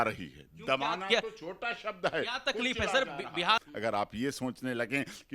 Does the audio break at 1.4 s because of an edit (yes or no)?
no